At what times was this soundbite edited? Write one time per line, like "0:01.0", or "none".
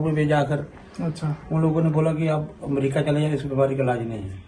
none